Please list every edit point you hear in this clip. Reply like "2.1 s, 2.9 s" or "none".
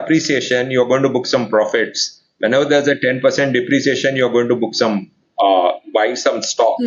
none